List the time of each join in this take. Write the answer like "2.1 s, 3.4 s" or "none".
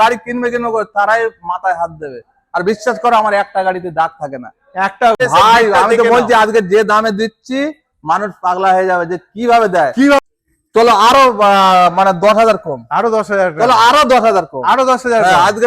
5.2 s, 10.2 s